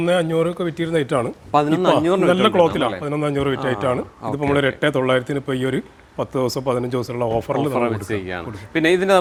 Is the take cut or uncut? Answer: uncut